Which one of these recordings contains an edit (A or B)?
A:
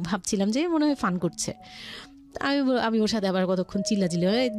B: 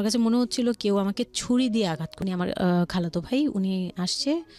B